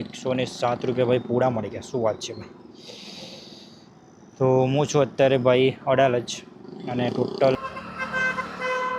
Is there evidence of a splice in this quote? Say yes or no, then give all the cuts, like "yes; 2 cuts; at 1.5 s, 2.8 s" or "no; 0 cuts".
yes; 1 cut; at 7.6 s